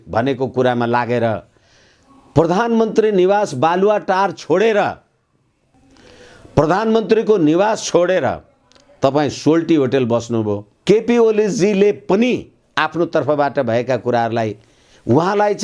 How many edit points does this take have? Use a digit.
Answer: 1